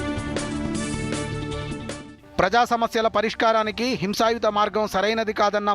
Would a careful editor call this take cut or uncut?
cut